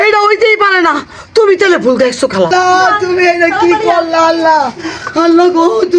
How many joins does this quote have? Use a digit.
1